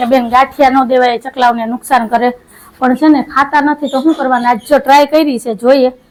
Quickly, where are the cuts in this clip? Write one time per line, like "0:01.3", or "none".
none